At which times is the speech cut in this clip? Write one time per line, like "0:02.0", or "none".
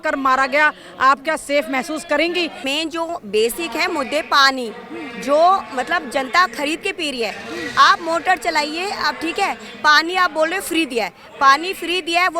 0:02.6